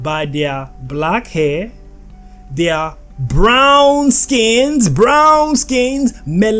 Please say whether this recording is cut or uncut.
uncut